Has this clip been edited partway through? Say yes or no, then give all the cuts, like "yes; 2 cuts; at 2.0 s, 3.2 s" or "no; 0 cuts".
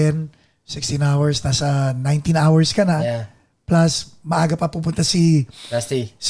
no; 0 cuts